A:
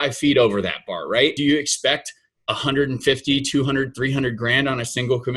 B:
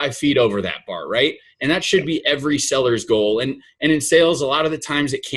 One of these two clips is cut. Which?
A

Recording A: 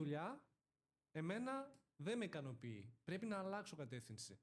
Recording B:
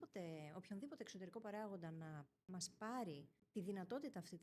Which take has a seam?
B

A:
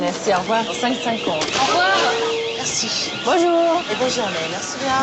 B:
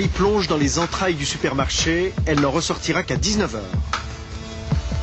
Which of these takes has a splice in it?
A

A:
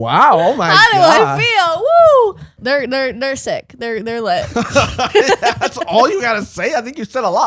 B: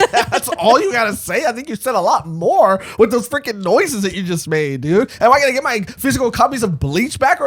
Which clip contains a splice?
A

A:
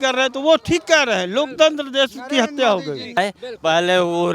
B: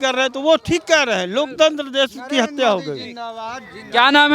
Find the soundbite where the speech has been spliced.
A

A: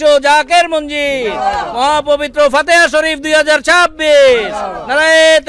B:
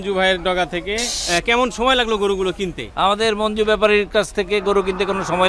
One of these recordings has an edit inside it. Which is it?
B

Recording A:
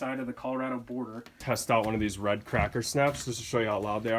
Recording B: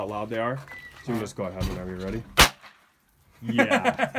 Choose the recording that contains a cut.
A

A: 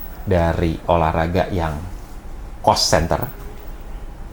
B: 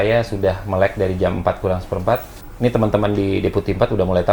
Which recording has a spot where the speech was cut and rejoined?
B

